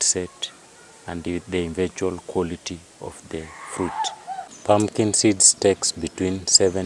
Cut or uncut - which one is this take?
cut